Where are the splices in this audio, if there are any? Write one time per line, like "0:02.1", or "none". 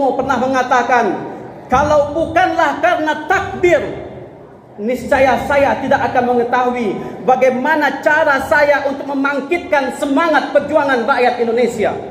none